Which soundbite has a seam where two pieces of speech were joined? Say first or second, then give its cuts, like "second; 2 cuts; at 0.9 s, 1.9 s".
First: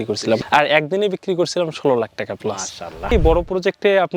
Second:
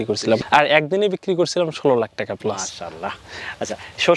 first; 1 cut; at 3.1 s